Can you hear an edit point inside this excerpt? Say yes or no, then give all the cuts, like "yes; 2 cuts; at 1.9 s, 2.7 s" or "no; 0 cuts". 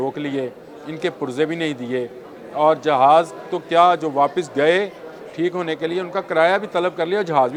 no; 0 cuts